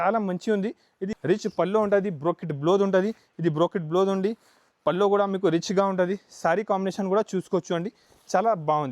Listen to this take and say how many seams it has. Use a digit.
1